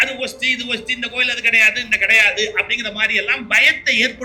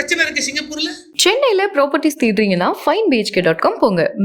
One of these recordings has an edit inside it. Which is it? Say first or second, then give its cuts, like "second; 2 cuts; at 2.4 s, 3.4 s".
second; 1 cut; at 1.1 s